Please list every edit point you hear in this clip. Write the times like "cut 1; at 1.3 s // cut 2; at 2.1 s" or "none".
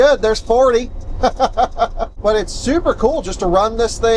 cut 1; at 2.1 s

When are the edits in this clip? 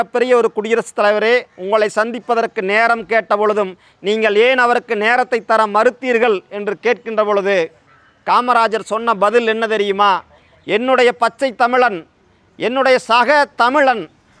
none

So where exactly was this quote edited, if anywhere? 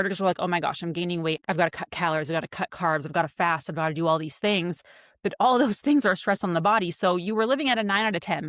cut 1; at 1.4 s

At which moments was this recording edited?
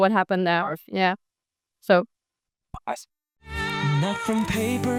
none

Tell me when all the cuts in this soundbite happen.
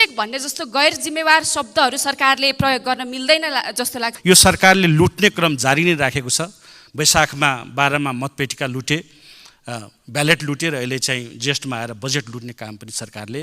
cut 1; at 4.1 s

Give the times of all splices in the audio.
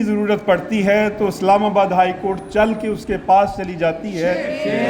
none

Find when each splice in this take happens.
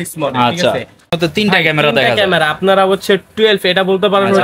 cut 1; at 1.1 s

